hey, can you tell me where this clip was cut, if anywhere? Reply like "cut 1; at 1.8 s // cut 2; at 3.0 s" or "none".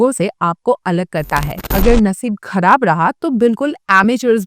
cut 1; at 1.7 s